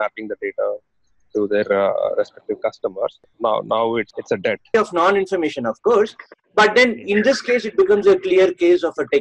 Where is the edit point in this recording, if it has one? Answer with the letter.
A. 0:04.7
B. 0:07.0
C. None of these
A